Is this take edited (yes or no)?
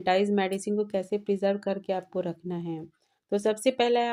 no